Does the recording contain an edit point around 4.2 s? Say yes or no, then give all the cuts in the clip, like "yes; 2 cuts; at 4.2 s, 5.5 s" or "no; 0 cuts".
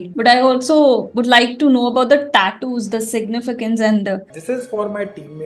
yes; 1 cut; at 4.2 s